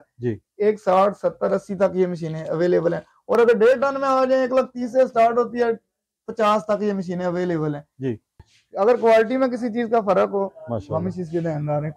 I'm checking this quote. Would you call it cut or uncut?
cut